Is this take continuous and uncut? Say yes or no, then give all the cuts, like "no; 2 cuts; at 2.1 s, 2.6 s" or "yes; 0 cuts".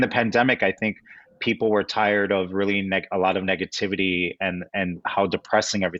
yes; 0 cuts